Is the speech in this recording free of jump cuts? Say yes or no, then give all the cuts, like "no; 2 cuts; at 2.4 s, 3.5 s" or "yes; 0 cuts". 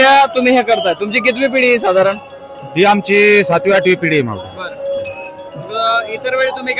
yes; 0 cuts